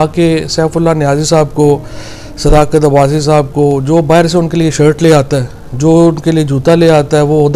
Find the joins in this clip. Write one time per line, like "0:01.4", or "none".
none

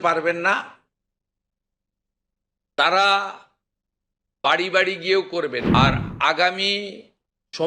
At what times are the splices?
0:05.6

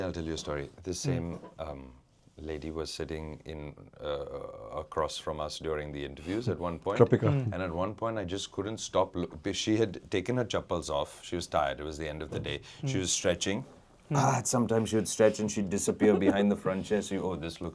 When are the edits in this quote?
none

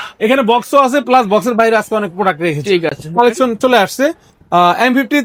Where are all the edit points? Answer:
none

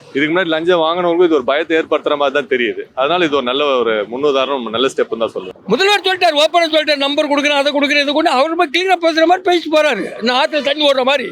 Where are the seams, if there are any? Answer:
0:05.5

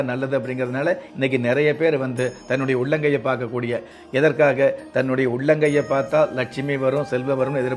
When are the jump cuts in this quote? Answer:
none

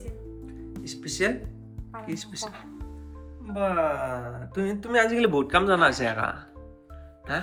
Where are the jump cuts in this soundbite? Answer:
none

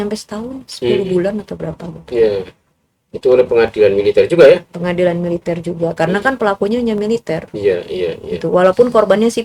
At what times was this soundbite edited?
none

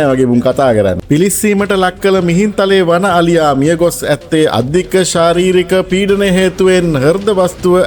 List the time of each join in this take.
0:01.0

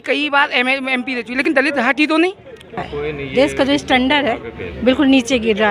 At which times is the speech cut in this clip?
0:02.8

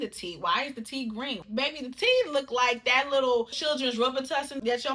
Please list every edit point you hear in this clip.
0:01.4
0:03.6

